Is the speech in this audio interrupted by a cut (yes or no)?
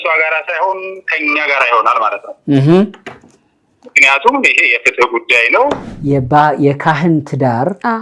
yes